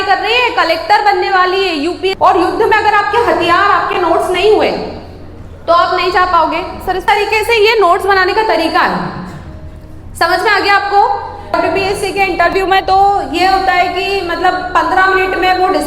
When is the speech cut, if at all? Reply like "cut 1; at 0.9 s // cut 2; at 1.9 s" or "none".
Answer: cut 1; at 2.1 s // cut 2; at 7.0 s // cut 3; at 11.5 s